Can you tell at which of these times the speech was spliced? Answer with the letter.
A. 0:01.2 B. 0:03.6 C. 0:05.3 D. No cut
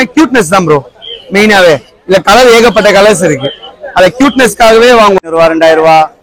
C